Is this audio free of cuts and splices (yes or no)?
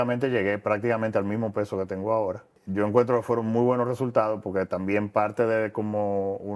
no